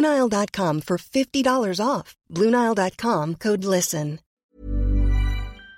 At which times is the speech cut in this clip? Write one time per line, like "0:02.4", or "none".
0:04.4

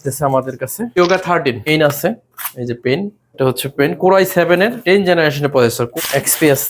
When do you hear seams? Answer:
0:00.8
0:01.7
0:03.2
0:04.8
0:05.8

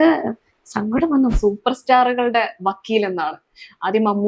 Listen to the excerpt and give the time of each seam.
0:01.4

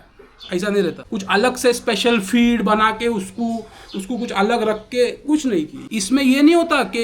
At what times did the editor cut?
0:01.1
0:05.8

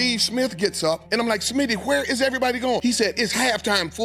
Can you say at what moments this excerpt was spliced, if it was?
0:01.0
0:02.8

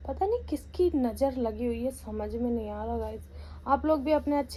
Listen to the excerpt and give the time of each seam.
none

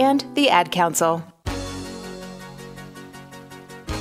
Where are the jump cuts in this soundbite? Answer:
0:01.3

